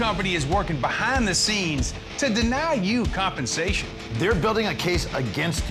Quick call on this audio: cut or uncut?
uncut